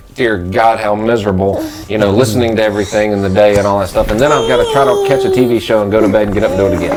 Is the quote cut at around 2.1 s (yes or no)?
no